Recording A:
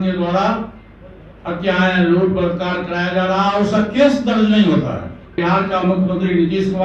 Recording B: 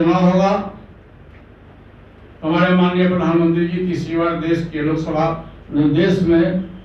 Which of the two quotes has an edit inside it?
A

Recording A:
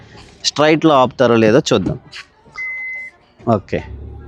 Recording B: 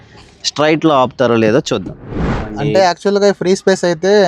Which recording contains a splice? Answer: B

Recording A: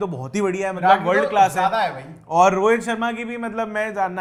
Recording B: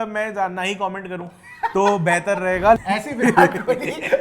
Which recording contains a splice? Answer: B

